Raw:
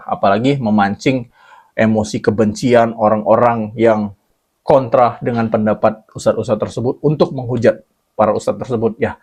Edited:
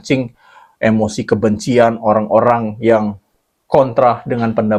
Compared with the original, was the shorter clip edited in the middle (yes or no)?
no